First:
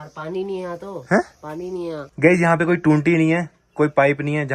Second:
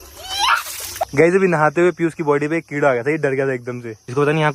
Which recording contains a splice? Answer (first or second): second